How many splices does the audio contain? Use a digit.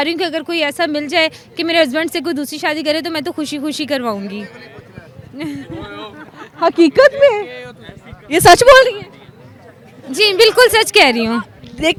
0